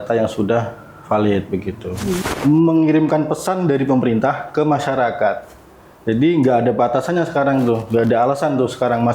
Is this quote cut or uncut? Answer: cut